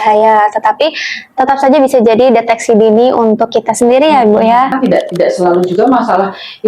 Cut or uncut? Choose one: cut